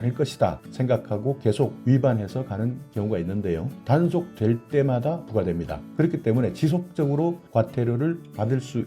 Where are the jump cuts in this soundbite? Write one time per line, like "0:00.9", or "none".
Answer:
0:01.8